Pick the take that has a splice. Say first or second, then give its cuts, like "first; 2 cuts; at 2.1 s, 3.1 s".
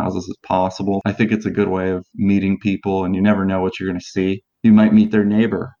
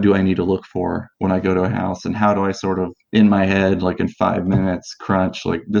first; 2 cuts; at 1.0 s, 4.5 s